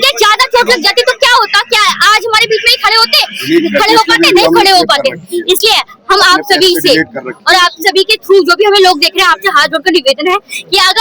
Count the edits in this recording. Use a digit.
0